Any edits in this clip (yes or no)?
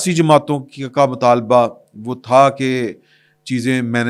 no